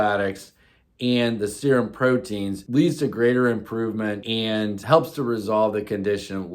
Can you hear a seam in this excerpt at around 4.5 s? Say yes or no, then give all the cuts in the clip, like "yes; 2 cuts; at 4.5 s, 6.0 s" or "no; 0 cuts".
yes; 2 cuts; at 2.5 s, 4.5 s